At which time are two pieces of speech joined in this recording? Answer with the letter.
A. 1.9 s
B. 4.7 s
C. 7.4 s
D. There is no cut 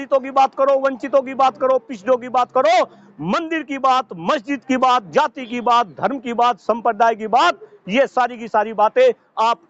D